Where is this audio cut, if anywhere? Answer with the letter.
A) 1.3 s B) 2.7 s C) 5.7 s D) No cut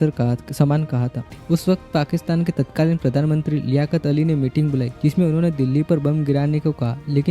A